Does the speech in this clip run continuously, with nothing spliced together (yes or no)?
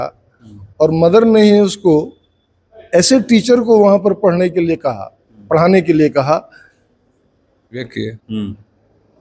no